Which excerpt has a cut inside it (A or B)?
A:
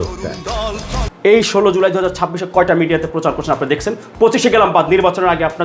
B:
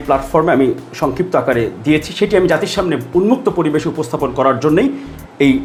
A